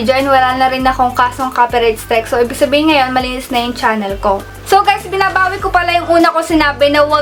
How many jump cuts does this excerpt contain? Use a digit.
0